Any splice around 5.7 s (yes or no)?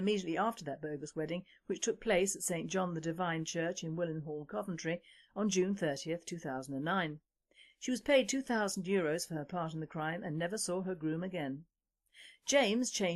no